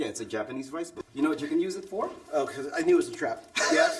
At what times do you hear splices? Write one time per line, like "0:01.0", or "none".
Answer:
0:01.0
0:02.2